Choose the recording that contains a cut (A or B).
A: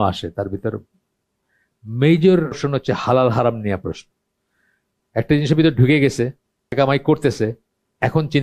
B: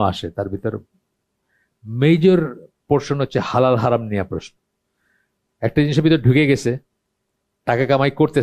A